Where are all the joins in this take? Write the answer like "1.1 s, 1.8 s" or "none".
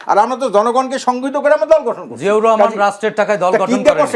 none